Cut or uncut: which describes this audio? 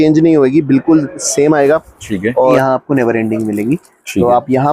cut